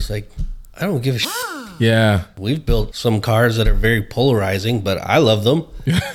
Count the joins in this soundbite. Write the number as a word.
one